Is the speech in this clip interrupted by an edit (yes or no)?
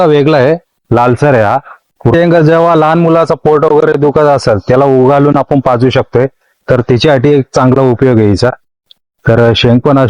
yes